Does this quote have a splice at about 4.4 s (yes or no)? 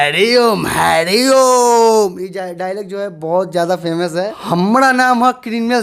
yes